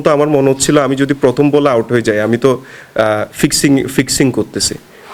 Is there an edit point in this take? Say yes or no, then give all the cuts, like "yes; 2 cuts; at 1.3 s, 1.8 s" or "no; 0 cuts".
no; 0 cuts